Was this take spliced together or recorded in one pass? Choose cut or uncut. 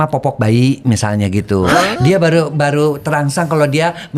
uncut